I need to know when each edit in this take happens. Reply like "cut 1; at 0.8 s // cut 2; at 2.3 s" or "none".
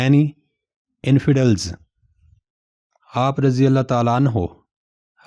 none